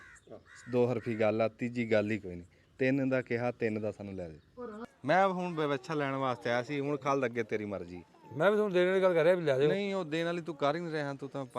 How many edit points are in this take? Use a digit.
1